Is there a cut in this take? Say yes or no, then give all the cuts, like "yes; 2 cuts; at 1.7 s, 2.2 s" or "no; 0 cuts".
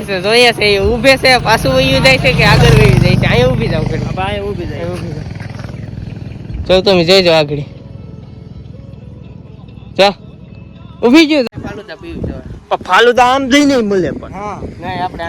yes; 1 cut; at 11.4 s